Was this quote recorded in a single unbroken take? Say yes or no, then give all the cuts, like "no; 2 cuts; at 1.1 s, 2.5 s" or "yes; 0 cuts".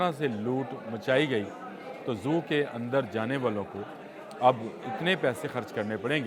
yes; 0 cuts